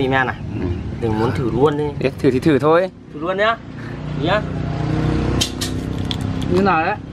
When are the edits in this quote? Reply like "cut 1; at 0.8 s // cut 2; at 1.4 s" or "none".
none